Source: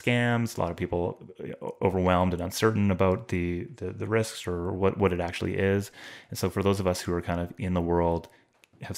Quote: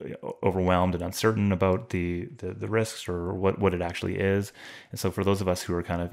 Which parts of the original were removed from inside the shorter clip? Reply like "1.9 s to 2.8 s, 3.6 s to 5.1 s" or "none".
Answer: none

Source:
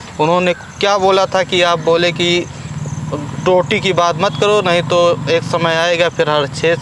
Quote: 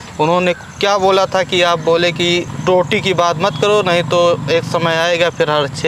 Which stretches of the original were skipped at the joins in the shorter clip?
2.5 s to 3.3 s

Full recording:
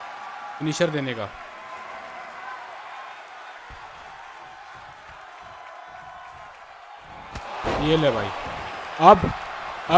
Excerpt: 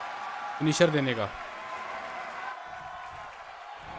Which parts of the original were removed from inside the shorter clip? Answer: 2.5 s to 5.8 s

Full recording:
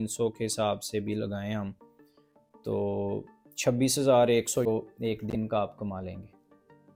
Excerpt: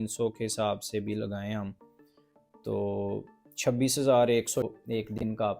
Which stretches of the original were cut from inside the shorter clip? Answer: 4.6 s to 4.8 s

